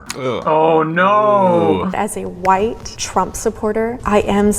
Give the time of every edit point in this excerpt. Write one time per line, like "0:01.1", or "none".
0:01.9